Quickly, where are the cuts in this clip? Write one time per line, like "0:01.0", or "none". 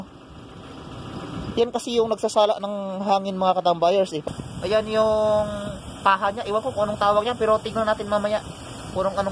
0:04.2